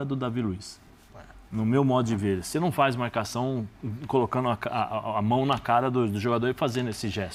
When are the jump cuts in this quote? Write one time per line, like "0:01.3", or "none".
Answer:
none